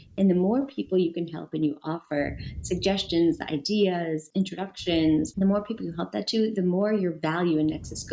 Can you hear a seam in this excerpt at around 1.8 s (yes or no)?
no